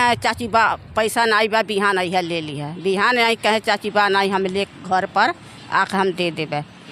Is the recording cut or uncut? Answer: uncut